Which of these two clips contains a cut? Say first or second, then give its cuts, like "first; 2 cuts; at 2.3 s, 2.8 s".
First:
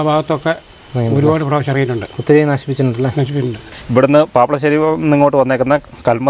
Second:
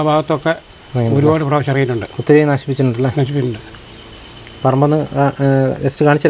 first; 1 cut; at 3.7 s